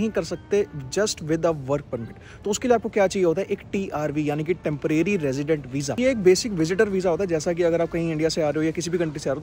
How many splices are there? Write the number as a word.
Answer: zero